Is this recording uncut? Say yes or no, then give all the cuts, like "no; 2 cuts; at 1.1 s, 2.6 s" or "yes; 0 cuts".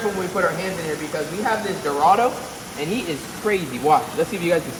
yes; 0 cuts